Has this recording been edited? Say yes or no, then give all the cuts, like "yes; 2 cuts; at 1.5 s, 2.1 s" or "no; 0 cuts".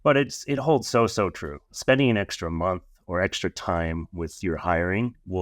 yes; 1 cut; at 1.7 s